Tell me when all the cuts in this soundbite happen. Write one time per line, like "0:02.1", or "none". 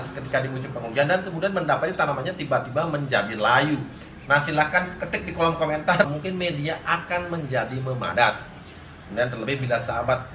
0:06.1